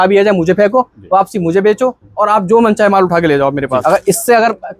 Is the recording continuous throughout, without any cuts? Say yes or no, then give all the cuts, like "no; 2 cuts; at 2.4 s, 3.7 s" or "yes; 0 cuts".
no; 1 cut; at 3.8 s